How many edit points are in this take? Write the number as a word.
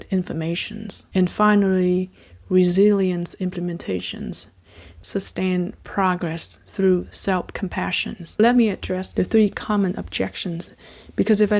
three